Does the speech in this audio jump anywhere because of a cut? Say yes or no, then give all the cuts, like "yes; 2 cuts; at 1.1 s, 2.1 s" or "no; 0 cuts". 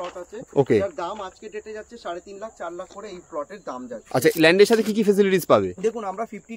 yes; 1 cut; at 4.3 s